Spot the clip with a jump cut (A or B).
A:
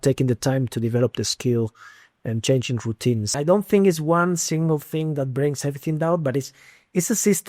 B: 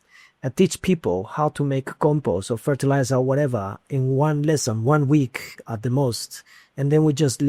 A